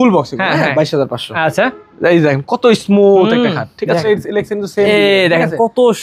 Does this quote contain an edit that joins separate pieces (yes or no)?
yes